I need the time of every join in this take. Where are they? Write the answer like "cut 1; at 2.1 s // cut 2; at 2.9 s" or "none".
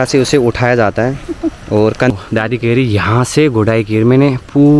cut 1; at 2.1 s